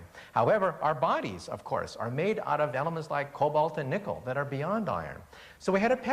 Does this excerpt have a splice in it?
yes; 1 cut; at 1.9 s

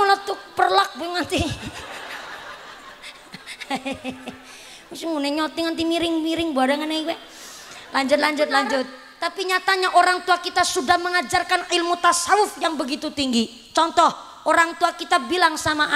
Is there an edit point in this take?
yes; 1 cut; at 9.0 s

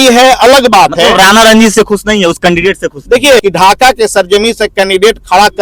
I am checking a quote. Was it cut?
yes; 1 cut; at 3.4 s

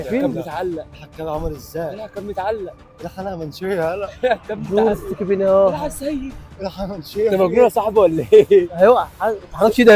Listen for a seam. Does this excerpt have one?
no; 0 cuts

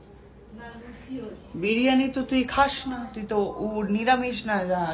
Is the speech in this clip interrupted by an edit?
no; 0 cuts

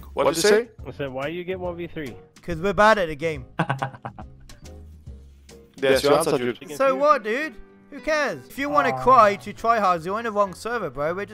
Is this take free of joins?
no; 1 cut; at 6.6 s

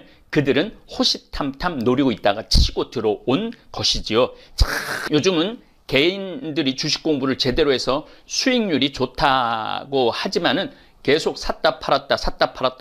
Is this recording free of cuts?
no; 1 cut; at 5.0 s

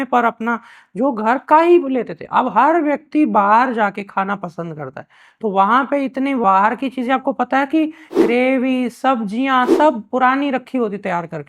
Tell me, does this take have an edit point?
no; 0 cuts

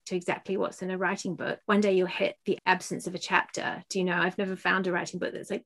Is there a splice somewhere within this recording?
yes; 2 cuts; at 1.6 s, 2.5 s

